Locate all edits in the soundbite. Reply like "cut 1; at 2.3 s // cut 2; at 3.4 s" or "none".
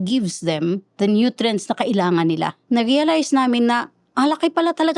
cut 1; at 0.9 s // cut 2; at 2.6 s